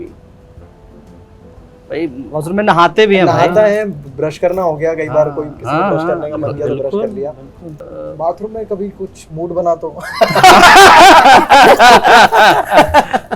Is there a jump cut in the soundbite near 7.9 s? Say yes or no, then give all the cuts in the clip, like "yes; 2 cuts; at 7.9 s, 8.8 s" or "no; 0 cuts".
yes; 1 cut; at 7.9 s